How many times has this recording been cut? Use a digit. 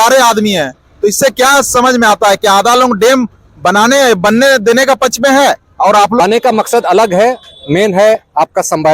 1